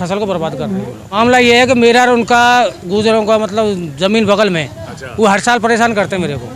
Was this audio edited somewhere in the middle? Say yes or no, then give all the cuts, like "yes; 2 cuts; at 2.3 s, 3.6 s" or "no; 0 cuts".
yes; 1 cut; at 1.0 s